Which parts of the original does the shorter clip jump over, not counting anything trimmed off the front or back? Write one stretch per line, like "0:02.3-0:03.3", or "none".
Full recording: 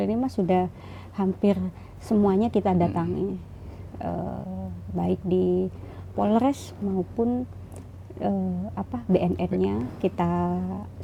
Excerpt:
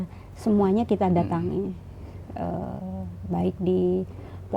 none

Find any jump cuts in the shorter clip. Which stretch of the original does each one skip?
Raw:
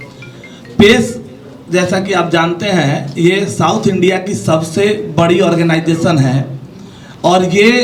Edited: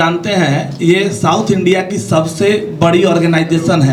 none

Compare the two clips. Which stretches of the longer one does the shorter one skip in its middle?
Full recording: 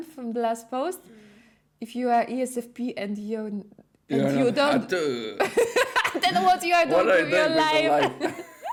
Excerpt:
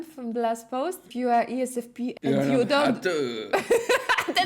0:01.0-0:01.8
0:03.0-0:04.0

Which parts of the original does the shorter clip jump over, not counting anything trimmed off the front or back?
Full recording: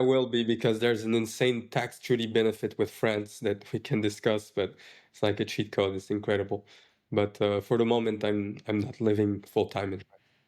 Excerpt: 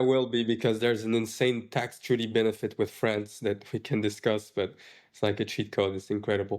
none

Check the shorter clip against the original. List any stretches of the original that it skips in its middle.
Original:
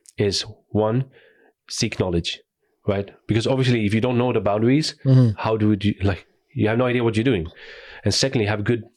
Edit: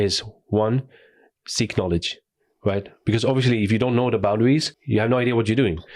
0:04.9-0:06.4

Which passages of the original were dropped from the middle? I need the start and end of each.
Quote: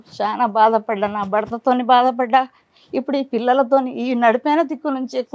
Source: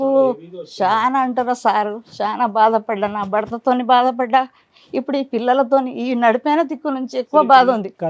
none

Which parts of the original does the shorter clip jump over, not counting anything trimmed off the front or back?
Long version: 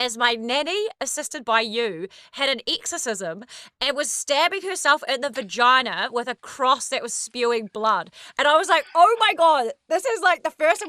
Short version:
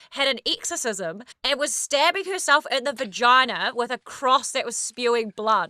0:03.5-0:03.7

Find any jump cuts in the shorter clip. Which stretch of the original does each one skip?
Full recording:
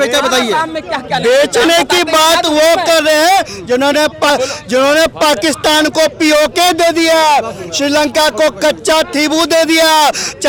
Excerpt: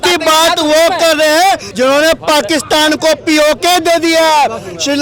0:03.5-0:04.6

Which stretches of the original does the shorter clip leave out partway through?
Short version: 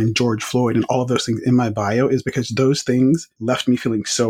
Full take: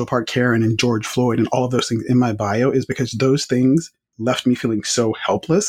0:03.9-0:04.1

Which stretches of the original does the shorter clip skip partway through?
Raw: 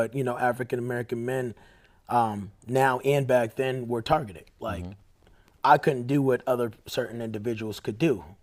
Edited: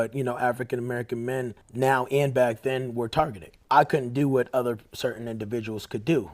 0:01.6-0:02.5
0:04.4-0:05.4

